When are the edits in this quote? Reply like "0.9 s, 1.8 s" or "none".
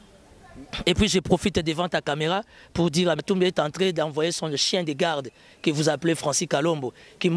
3.2 s